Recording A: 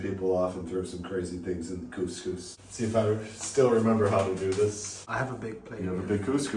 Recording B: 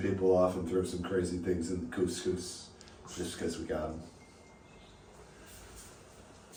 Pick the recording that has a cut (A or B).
A